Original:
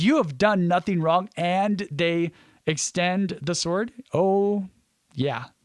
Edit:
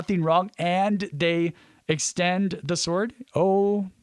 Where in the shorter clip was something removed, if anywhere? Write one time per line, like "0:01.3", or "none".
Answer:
none